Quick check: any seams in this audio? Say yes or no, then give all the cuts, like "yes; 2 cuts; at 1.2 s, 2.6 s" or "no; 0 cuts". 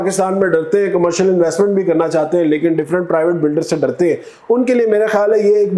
no; 0 cuts